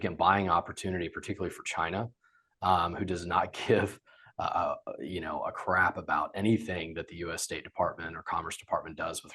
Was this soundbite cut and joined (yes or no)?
no